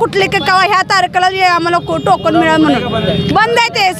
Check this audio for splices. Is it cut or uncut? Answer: uncut